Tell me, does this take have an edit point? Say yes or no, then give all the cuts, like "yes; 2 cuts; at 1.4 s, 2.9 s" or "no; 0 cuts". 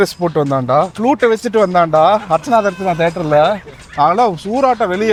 no; 0 cuts